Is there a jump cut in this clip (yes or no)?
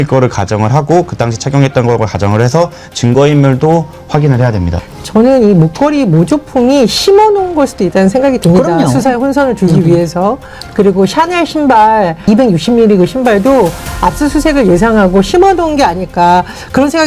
yes